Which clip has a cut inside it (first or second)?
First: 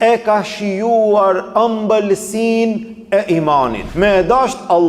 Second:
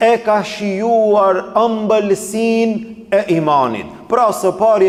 first